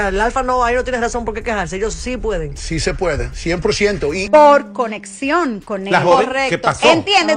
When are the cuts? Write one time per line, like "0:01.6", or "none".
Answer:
0:04.2